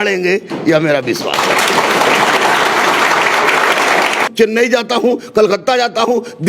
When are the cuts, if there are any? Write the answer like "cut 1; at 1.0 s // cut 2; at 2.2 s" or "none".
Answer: cut 1; at 4.2 s